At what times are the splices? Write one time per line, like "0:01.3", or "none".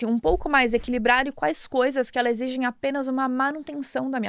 none